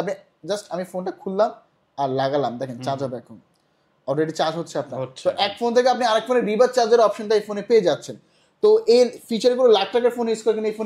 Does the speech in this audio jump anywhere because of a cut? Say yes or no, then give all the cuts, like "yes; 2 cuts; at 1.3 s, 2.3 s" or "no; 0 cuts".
no; 0 cuts